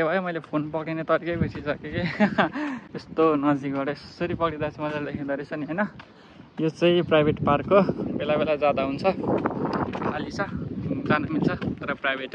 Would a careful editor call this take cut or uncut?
uncut